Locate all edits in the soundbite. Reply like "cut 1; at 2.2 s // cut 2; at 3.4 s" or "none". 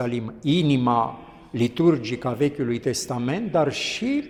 none